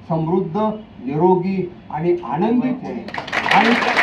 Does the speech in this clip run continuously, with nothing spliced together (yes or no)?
no